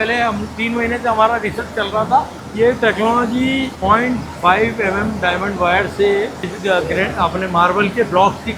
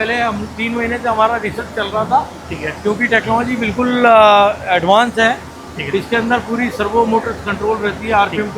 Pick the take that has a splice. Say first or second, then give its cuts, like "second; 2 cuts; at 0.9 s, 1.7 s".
first; 3 cuts; at 2.4 s, 3.7 s, 6.5 s